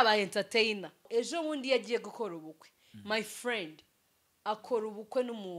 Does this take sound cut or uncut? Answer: cut